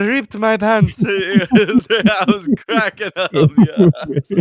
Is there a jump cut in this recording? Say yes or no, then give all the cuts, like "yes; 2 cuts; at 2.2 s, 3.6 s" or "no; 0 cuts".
no; 0 cuts